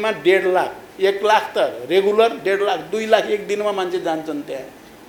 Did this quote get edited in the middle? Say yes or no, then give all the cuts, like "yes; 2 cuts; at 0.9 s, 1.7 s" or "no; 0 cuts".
no; 0 cuts